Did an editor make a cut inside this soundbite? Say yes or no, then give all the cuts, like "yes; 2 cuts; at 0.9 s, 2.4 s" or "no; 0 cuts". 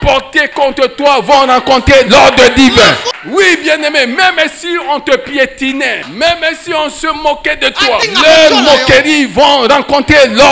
yes; 3 cuts; at 3.1 s, 6.0 s, 8.0 s